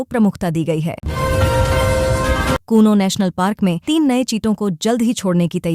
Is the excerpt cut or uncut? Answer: cut